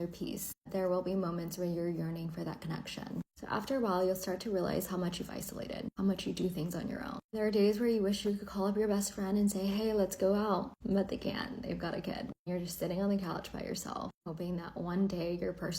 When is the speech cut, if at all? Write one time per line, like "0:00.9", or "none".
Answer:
0:05.3